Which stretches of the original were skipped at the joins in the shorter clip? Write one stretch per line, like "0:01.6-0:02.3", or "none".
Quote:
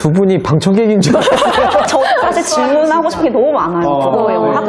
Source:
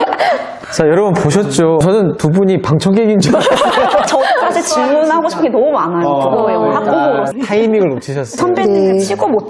none